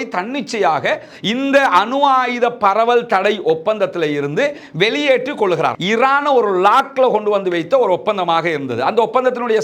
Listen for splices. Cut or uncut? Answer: cut